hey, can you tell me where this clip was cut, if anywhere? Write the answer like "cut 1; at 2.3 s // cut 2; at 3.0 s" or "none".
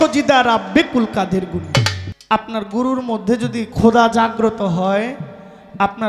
cut 1; at 2.0 s